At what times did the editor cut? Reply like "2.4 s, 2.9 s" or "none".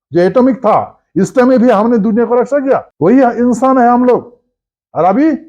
2.9 s